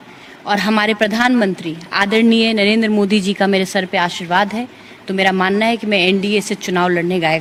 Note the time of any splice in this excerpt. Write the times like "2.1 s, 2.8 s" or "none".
none